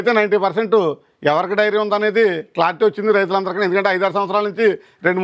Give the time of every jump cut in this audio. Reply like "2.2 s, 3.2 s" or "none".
none